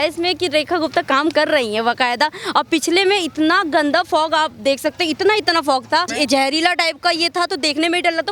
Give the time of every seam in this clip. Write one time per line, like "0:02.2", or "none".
0:06.1

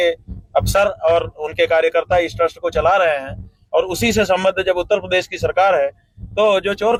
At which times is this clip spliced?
none

